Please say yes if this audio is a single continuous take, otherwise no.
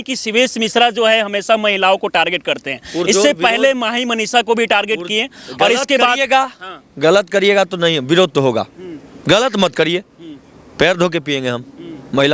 yes